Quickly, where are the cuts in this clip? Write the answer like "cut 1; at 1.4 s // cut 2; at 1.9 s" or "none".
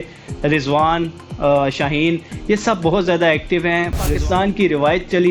cut 1; at 4.1 s